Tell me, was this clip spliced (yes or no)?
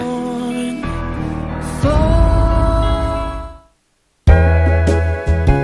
yes